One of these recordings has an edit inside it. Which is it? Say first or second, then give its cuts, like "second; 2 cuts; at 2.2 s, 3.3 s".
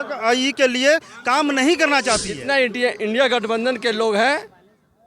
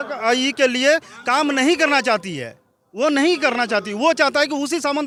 first; 1 cut; at 2.3 s